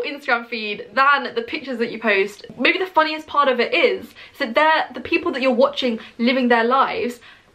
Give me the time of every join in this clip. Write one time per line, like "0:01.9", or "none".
0:02.4